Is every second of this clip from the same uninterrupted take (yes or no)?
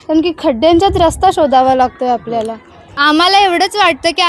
no